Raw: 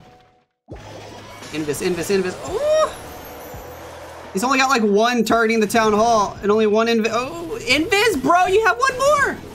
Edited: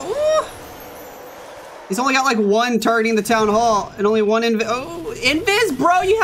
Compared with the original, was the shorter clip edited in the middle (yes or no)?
no